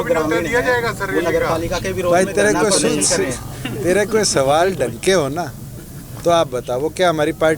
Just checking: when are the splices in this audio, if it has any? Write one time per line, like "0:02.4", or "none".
none